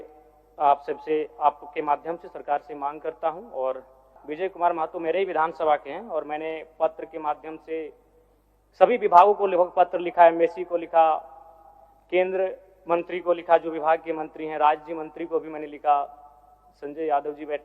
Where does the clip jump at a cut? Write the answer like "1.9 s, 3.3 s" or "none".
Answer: 4.1 s